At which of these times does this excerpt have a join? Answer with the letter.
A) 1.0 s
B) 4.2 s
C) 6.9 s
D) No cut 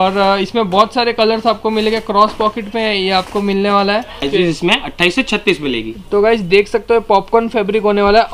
B